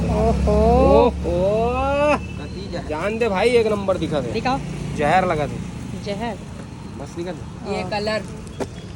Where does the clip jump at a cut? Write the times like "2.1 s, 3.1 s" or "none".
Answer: none